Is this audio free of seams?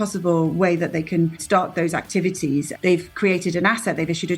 no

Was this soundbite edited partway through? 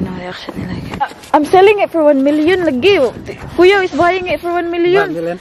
yes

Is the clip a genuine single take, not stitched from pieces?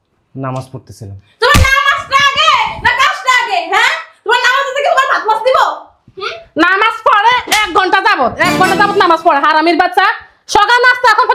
yes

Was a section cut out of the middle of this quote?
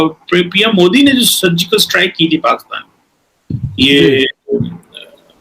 no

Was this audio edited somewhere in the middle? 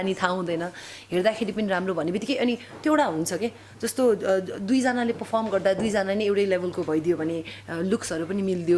no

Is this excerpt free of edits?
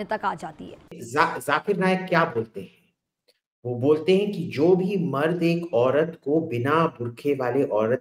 yes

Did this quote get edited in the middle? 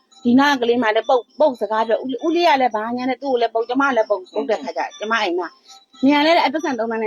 no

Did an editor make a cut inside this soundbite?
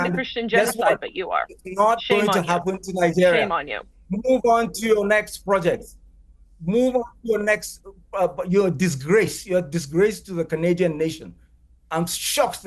no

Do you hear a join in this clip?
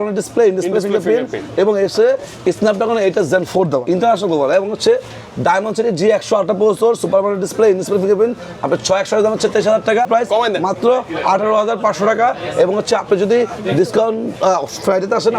yes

